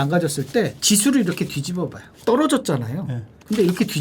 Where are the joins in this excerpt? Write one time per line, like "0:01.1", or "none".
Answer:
0:02.1